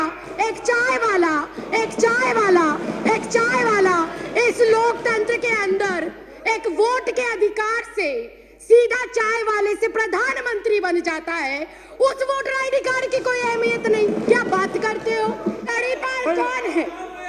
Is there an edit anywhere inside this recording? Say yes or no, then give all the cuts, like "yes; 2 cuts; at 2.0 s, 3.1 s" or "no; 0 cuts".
yes; 1 cut; at 15.7 s